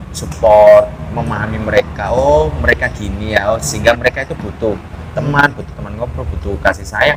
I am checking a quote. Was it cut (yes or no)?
no